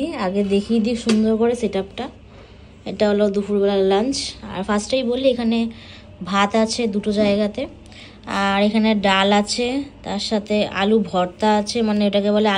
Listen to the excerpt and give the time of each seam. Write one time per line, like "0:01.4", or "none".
none